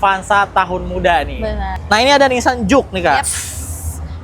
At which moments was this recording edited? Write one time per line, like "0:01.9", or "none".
0:01.7